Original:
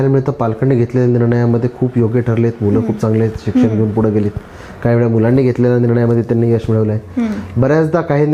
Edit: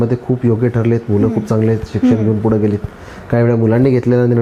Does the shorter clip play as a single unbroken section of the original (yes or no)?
yes